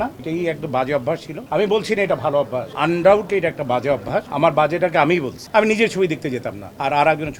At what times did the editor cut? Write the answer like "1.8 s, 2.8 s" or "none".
none